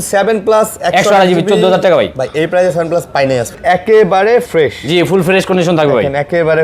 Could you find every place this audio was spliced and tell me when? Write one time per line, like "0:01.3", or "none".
0:03.6